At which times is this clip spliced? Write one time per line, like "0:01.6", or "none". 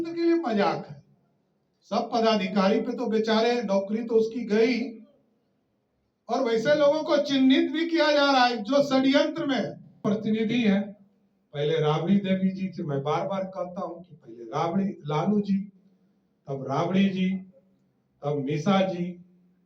0:10.0